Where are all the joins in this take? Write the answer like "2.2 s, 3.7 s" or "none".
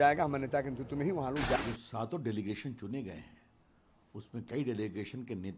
1.6 s

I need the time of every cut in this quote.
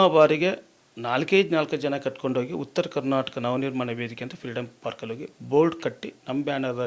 none

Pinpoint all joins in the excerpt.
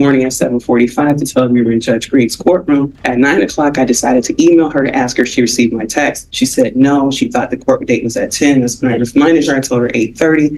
none

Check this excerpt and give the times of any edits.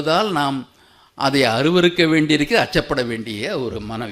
none

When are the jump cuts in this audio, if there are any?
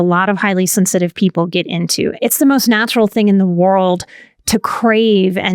2.1 s

